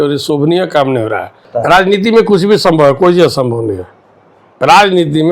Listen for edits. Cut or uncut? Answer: cut